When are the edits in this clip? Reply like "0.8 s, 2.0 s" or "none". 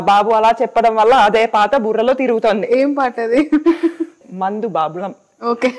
4.3 s